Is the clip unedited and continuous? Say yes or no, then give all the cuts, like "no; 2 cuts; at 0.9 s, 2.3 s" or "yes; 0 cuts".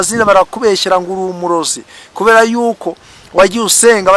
yes; 0 cuts